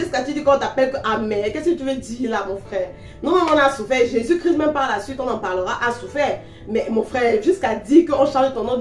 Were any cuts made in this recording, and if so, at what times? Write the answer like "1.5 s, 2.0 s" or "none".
none